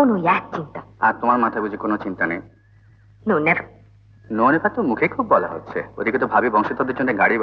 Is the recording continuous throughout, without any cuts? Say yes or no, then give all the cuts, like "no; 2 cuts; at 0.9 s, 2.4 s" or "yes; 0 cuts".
yes; 0 cuts